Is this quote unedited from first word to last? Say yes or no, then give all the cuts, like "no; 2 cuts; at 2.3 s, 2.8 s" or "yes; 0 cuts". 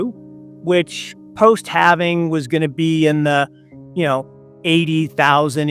yes; 0 cuts